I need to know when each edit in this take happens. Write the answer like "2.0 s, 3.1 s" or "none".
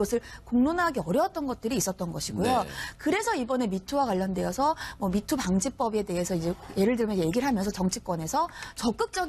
6.2 s